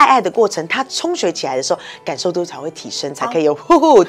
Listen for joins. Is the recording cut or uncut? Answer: uncut